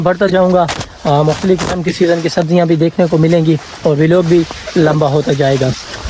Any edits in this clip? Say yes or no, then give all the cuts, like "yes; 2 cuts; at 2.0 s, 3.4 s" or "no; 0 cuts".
no; 0 cuts